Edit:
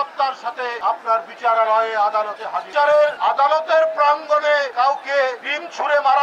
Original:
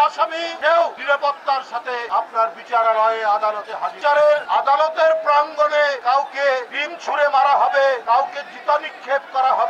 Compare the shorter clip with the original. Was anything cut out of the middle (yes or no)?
no